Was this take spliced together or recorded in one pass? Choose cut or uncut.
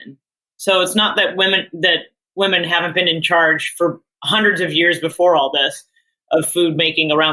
cut